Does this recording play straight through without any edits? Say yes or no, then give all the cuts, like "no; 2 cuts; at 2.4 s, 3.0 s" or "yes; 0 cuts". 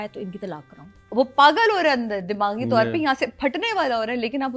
no; 1 cut; at 1.0 s